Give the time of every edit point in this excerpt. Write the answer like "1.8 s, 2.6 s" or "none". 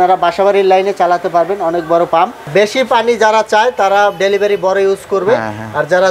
2.5 s